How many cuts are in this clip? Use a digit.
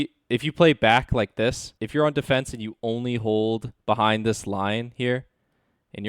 1